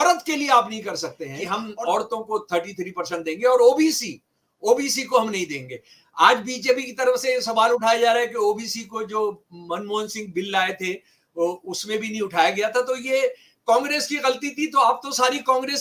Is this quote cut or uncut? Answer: cut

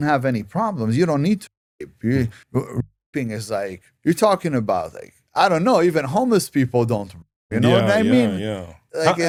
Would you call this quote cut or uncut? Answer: uncut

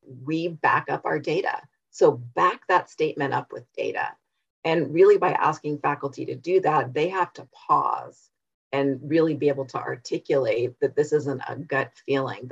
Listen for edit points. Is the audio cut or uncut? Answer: uncut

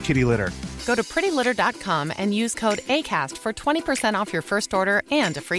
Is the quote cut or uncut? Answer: uncut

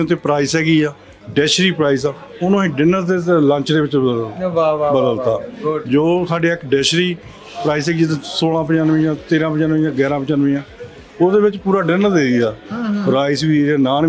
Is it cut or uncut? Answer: uncut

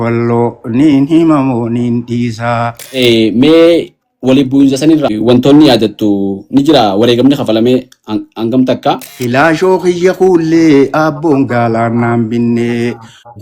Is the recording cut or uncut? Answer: cut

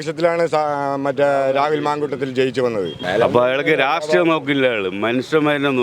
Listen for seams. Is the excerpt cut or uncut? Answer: cut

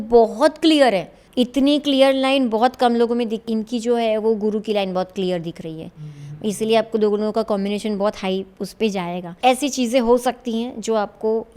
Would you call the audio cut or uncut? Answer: cut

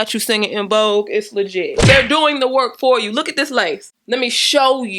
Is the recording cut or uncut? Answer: cut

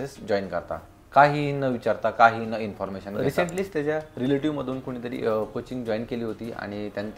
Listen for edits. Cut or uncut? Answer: cut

